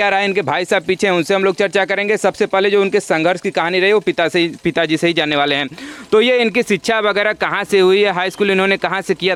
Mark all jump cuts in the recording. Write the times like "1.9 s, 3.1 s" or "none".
none